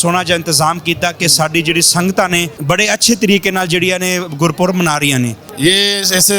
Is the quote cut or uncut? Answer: cut